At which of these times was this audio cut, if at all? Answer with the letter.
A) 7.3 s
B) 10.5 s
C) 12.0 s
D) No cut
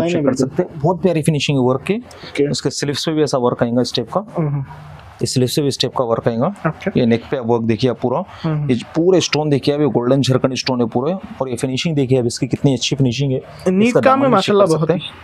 D